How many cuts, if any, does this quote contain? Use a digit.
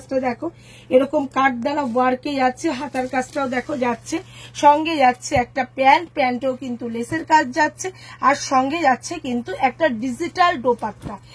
0